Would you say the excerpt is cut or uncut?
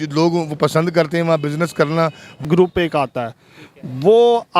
cut